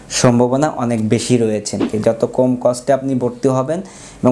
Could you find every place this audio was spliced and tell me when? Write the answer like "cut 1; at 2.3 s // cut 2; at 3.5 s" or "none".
cut 1; at 1.9 s